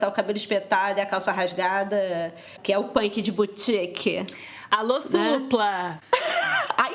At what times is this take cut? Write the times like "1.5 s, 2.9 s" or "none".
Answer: 2.6 s, 5.9 s